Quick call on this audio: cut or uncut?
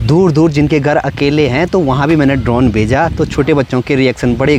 uncut